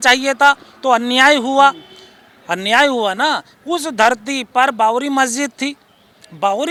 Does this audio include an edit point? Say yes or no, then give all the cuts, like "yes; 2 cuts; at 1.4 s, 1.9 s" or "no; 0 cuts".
no; 0 cuts